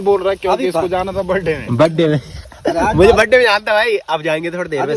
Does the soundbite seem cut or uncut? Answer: uncut